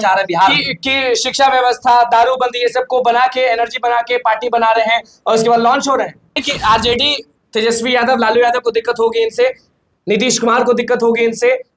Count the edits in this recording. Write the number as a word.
one